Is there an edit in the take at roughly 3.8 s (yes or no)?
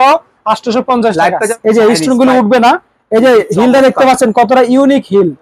no